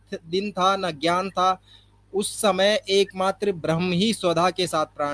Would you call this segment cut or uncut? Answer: uncut